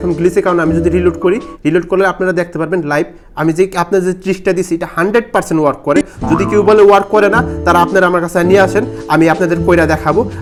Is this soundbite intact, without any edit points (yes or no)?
yes